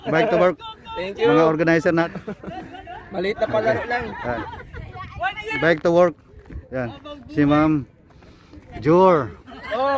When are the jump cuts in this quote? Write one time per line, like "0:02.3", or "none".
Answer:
0:02.1
0:05.6